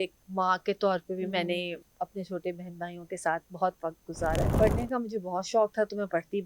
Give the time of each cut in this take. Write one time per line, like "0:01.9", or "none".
0:01.8
0:04.6